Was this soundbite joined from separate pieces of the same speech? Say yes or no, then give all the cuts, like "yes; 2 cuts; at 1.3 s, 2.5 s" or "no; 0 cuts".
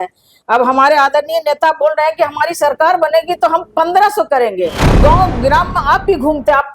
yes; 1 cut; at 4.8 s